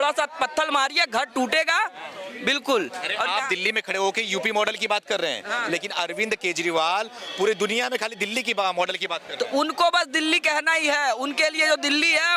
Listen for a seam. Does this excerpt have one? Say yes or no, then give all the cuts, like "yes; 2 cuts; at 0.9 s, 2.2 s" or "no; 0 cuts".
no; 0 cuts